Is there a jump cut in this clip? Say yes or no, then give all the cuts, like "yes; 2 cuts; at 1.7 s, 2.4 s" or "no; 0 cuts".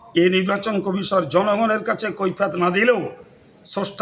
no; 0 cuts